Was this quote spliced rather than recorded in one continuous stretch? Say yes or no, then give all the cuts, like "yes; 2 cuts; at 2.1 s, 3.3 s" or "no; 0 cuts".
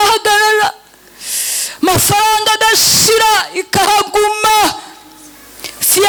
no; 0 cuts